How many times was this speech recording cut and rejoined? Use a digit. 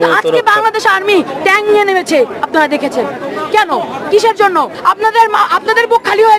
1